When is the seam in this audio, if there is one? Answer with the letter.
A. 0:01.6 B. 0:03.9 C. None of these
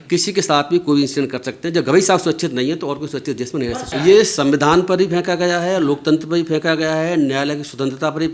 B